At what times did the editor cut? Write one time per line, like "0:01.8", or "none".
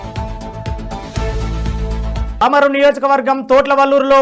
0:02.3